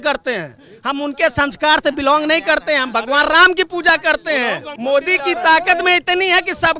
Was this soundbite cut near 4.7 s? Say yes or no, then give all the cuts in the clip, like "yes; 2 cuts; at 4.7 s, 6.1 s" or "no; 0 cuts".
yes; 1 cut; at 4.7 s